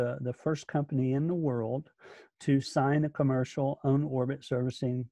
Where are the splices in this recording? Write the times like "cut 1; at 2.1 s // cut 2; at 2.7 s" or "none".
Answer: none